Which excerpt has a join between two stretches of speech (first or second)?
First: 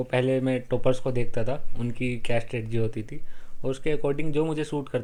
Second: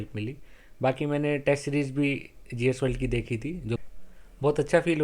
second